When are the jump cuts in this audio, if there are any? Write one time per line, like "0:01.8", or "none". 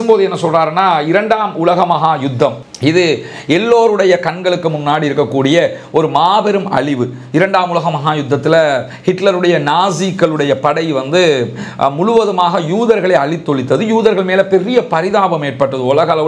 none